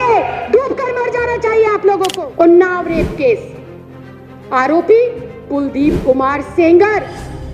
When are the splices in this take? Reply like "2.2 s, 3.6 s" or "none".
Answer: 2.1 s